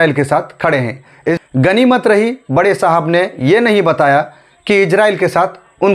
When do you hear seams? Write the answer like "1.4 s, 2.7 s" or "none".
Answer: 1.4 s